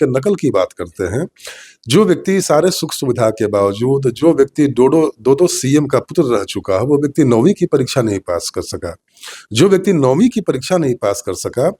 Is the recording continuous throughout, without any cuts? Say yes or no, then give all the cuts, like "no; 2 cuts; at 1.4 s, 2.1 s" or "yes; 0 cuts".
yes; 0 cuts